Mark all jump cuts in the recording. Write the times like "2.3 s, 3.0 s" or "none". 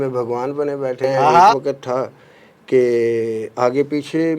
1.6 s